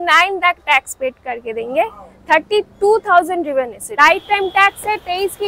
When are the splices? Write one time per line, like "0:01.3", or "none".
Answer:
0:03.8